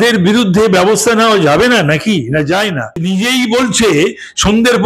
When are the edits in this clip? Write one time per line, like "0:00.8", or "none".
0:03.0